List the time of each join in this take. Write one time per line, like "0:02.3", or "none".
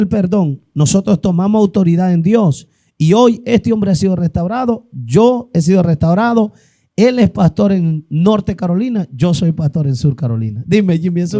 none